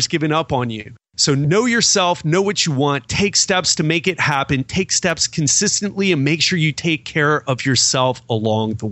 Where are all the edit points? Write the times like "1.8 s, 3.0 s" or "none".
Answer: none